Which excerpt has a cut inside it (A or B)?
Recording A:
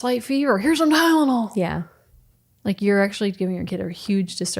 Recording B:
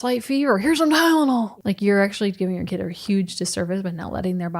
B